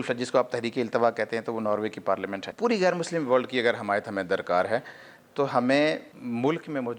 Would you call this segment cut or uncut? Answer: cut